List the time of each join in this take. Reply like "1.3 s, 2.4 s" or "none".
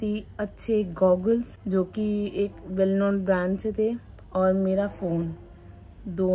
none